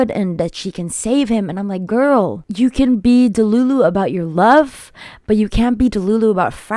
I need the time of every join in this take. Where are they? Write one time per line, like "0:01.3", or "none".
none